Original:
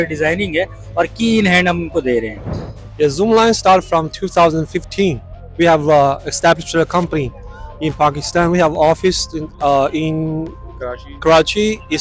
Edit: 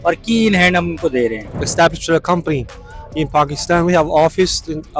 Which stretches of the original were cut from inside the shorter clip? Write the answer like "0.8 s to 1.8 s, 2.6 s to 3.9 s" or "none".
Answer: 2.5 s to 6.3 s